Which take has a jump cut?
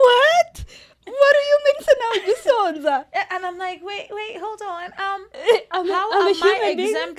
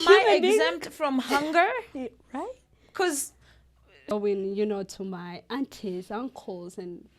second; 1 cut; at 4.0 s

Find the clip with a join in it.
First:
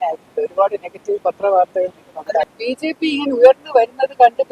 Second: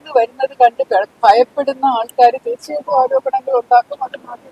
first; 1 cut; at 2.6 s

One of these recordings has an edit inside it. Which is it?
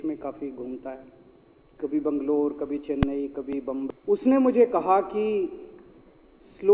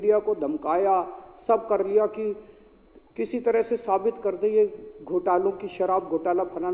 first; 1 cut; at 3.9 s

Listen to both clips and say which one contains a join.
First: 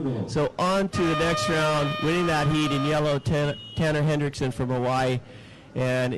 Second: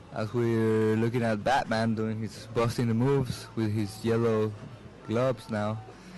second; 1 cut; at 3.0 s

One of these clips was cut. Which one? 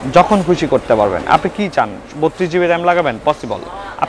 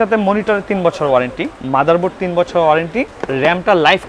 second; 1 cut; at 3.2 s

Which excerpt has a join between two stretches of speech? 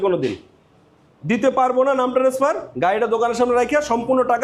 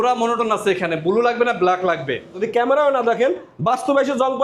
second; 1 cut; at 2.5 s

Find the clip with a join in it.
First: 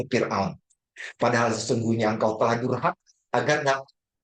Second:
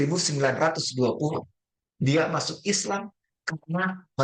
first; 1 cut; at 3.1 s

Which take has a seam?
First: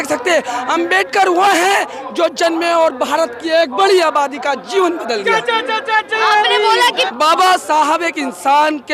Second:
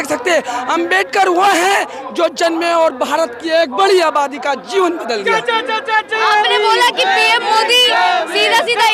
first; 1 cut; at 7.1 s

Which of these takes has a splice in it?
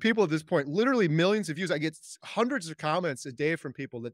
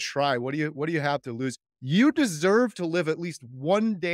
second; 1 cut; at 1.7 s

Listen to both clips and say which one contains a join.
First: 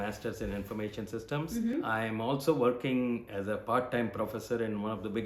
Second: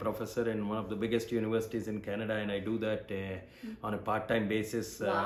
first; 1 cut; at 1.7 s

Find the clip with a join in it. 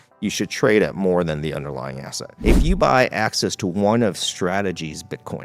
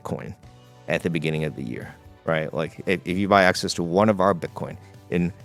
first; 1 cut; at 2.3 s

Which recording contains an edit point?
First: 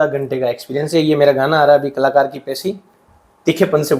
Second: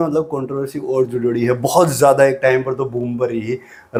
first; 1 cut; at 2.9 s

